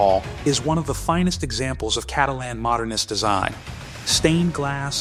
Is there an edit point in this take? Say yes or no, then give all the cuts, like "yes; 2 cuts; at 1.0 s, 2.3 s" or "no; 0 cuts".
no; 0 cuts